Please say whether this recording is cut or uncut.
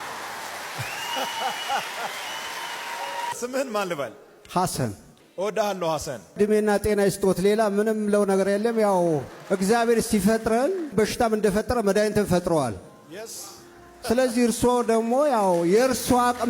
uncut